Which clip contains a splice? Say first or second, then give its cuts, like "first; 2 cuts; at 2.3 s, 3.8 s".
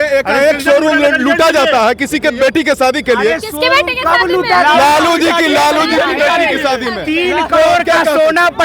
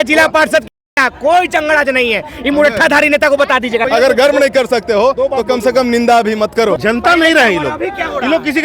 second; 2 cuts; at 3.8 s, 6.8 s